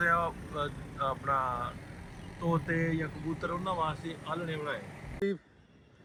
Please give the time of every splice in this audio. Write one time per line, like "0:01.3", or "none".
none

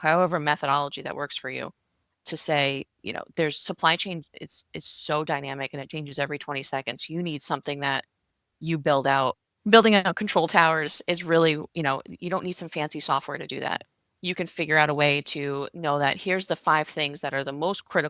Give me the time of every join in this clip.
0:09.5

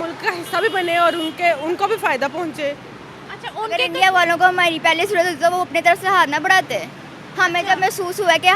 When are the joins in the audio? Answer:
0:03.7

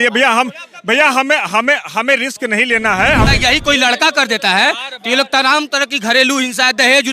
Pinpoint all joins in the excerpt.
0:03.3

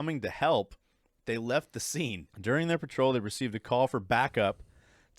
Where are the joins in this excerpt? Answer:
0:02.3

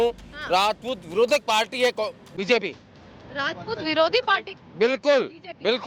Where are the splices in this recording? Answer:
none

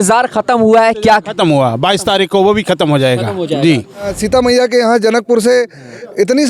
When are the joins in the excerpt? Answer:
0:04.1

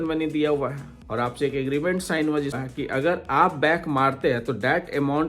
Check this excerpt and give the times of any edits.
0:02.6

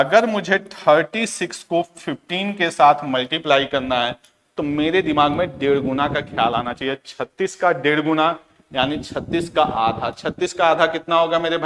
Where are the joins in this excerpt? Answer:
none

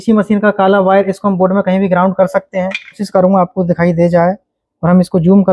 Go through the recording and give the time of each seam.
0:03.0

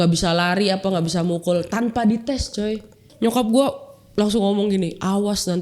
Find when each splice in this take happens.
0:03.1

